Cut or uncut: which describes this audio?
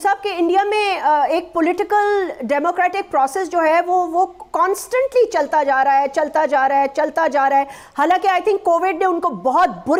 uncut